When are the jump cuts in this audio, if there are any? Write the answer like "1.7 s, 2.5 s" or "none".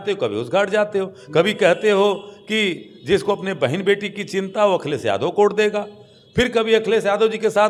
none

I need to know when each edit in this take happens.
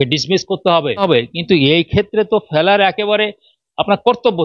1.0 s

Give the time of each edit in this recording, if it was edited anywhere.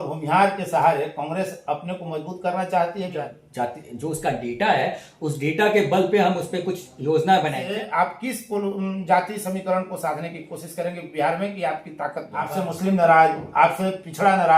3.2 s, 7.6 s, 12.5 s

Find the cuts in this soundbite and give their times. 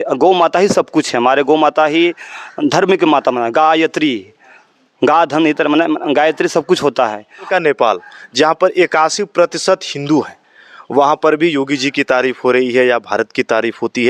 7.5 s

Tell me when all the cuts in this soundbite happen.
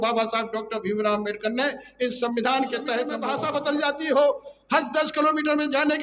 3.3 s

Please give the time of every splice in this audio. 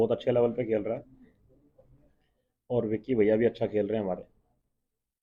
none

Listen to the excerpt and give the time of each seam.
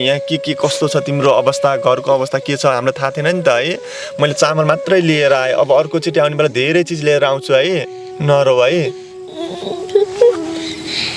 8.1 s

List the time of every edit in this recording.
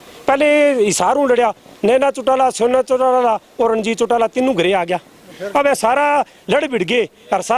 none

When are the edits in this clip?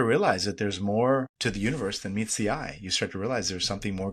1.3 s

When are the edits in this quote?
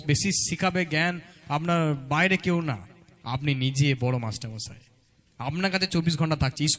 none

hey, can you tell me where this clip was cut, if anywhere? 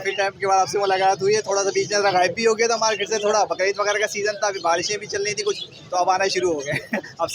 none

